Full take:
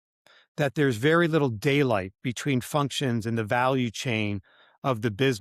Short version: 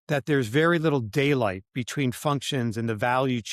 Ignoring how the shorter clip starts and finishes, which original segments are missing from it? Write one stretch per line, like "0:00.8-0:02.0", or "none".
none